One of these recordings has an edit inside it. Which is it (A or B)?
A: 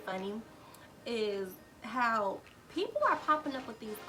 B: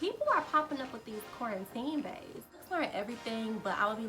B